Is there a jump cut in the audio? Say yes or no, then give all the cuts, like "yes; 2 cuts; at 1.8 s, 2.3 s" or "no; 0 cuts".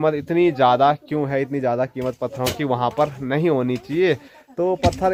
no; 0 cuts